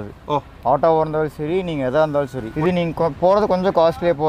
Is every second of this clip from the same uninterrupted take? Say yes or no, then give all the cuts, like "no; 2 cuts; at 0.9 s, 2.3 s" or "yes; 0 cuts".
no; 1 cut; at 2.4 s